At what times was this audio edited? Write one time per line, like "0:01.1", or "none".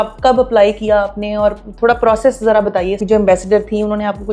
0:03.0